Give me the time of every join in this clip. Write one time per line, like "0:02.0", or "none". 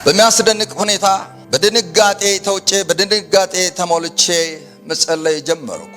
0:01.3

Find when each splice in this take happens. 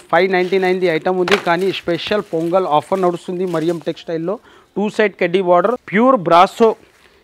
0:05.8

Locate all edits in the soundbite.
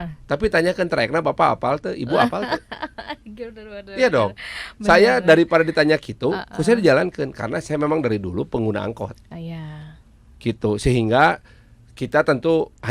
none

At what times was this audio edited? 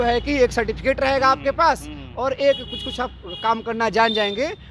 none

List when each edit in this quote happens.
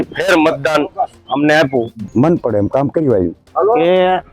0:02.0
0:03.4

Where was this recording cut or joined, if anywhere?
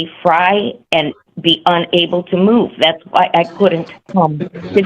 0:03.9

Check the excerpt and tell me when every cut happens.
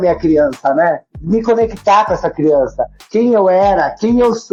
none

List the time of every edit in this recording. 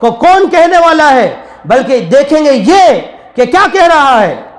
none

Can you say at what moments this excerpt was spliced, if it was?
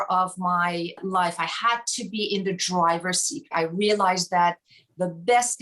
0:01.0
0:03.5

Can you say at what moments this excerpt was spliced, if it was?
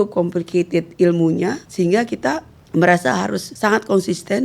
0:01.6
0:03.5

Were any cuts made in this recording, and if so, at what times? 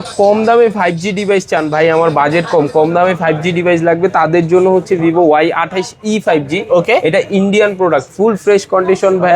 none

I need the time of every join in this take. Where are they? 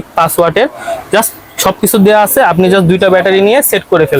none

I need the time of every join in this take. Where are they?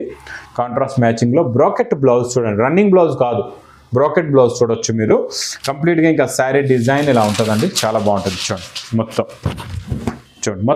none

